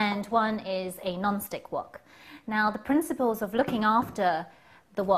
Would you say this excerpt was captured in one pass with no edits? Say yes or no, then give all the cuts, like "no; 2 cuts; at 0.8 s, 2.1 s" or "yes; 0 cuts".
no; 1 cut; at 1.0 s